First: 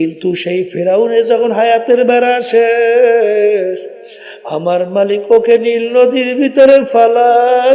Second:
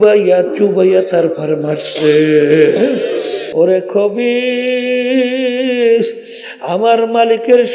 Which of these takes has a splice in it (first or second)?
second